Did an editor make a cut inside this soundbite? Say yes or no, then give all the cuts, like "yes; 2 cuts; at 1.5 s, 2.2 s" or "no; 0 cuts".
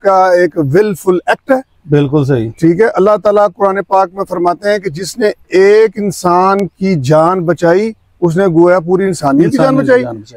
no; 0 cuts